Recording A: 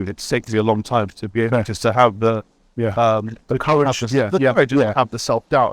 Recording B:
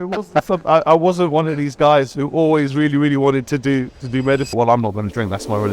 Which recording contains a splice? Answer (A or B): B